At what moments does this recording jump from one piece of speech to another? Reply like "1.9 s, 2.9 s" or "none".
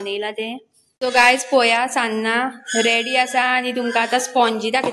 1.1 s